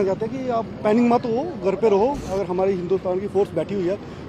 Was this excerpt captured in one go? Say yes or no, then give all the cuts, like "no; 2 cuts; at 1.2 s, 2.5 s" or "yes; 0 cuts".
no; 1 cut; at 2.2 s